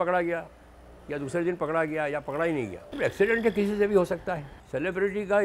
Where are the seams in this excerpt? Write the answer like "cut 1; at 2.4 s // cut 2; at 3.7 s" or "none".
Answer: cut 1; at 2.8 s // cut 2; at 4.5 s